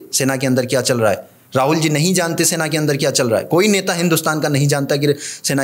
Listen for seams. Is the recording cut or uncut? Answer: uncut